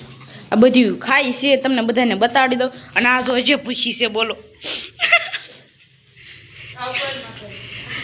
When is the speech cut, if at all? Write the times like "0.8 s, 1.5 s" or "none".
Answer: none